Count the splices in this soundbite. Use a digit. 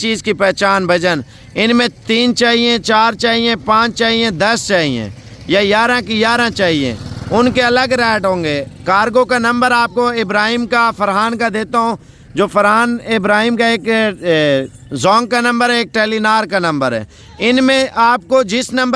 0